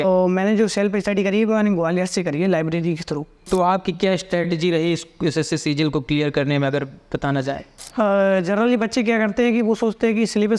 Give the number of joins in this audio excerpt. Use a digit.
2